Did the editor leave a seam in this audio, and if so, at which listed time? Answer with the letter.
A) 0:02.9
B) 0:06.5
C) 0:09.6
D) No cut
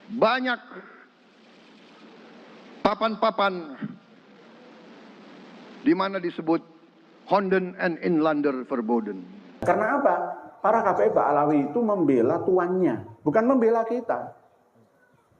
C